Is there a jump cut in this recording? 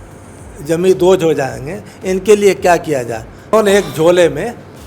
yes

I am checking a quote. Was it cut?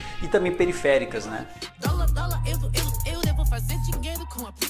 yes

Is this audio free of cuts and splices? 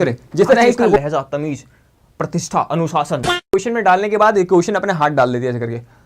no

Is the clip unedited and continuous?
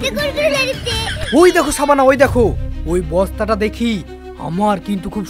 no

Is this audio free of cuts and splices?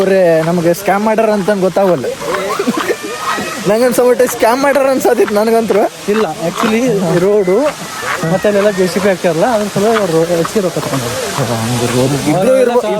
yes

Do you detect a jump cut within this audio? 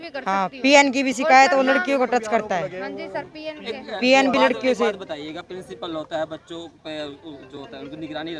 no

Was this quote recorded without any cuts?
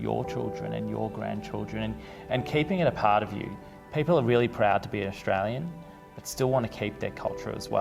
yes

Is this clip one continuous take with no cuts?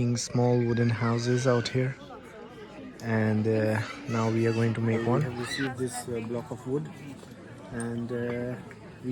yes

